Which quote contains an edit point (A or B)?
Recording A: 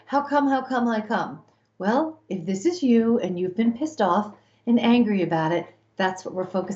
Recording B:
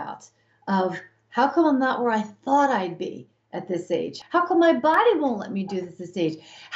B